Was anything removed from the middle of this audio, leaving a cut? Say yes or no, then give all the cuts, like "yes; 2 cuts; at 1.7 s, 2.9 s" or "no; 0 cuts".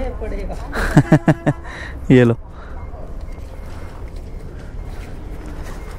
no; 0 cuts